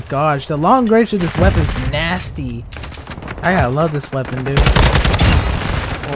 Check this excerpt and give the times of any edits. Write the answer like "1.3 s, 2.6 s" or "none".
none